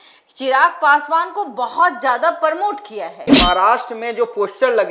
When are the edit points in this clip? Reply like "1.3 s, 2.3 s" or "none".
3.3 s